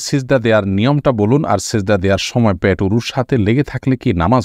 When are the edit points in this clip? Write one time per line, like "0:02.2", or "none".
none